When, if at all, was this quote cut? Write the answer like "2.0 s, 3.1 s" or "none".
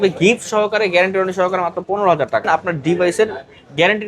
2.5 s